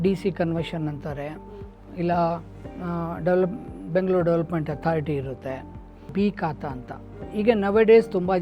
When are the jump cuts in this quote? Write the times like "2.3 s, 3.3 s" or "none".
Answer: 6.1 s